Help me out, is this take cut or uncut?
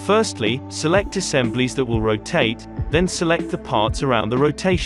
cut